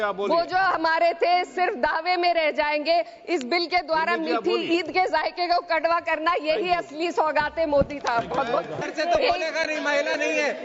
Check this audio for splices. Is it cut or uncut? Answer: cut